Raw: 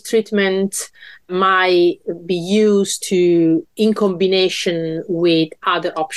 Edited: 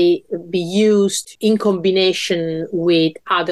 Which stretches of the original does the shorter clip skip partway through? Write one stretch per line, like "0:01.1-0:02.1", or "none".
0:03.1-0:03.7

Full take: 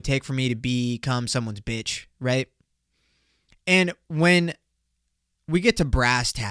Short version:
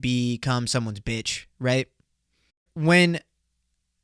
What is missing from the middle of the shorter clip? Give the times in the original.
0:03.3-0:04.0

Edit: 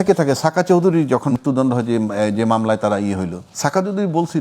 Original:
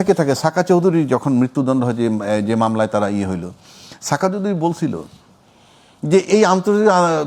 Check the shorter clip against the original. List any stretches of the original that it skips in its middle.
0:01.3-0:01.4
0:03.5-0:03.9

